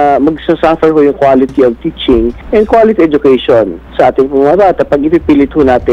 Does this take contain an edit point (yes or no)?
yes